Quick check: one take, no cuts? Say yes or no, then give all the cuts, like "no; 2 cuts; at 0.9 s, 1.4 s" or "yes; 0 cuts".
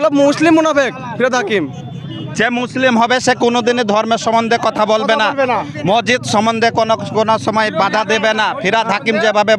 yes; 0 cuts